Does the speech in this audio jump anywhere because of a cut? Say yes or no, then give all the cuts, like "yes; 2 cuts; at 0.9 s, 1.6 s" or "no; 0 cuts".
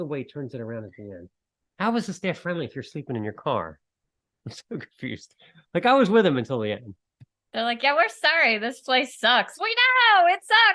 no; 0 cuts